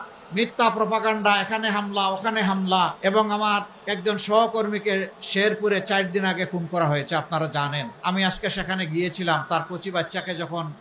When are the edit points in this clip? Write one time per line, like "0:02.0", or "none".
0:02.9
0:03.8
0:07.9